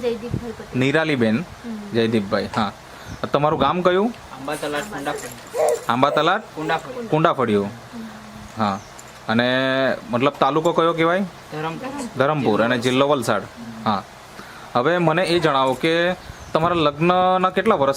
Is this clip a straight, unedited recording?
yes; 0 cuts

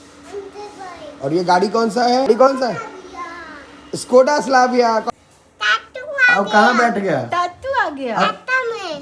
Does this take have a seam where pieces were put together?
yes; 2 cuts; at 2.3 s, 5.1 s

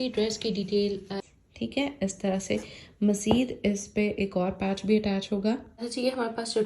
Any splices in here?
yes; 2 cuts; at 1.2 s, 5.7 s

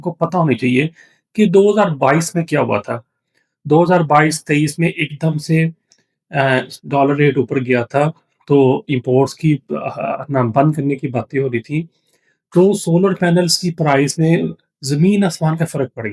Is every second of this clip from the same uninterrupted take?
yes; 0 cuts

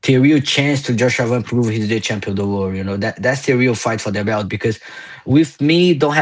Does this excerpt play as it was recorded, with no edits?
yes; 0 cuts

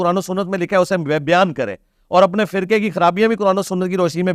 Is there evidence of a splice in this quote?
no; 0 cuts

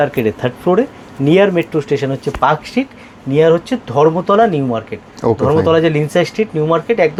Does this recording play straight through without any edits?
yes; 0 cuts

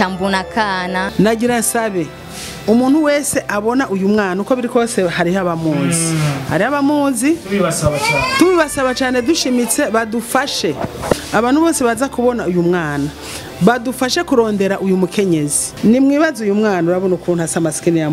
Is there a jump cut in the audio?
yes; 3 cuts; at 1.1 s, 11.2 s, 15.6 s

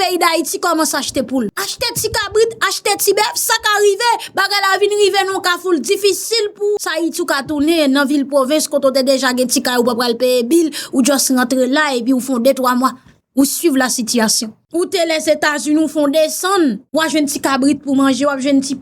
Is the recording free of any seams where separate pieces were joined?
no; 2 cuts; at 1.6 s, 6.9 s

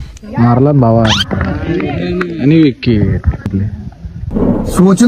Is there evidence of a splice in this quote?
yes; 1 cut; at 3.4 s

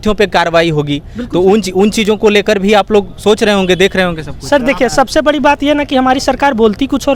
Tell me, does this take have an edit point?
no; 0 cuts

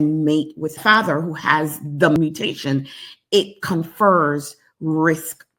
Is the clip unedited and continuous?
no; 1 cut; at 2.2 s

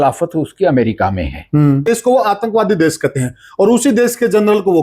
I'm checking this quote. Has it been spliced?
yes; 1 cut; at 1.9 s

